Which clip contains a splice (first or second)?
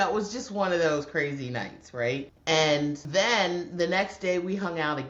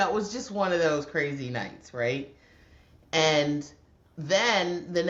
first